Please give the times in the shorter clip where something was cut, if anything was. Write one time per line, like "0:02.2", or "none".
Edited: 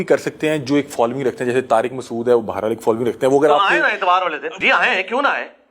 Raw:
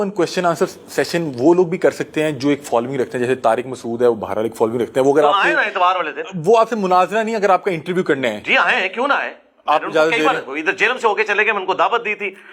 0:04.6